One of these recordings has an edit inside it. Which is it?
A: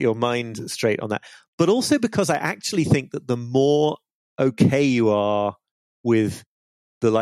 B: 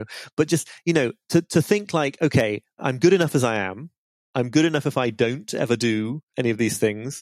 B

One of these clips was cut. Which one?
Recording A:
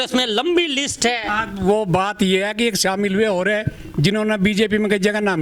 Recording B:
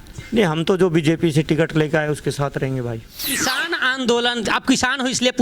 B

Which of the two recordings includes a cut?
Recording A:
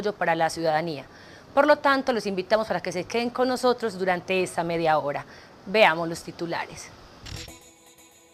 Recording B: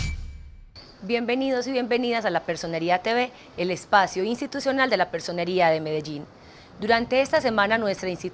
A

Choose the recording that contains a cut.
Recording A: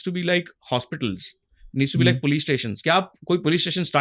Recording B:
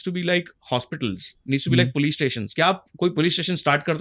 B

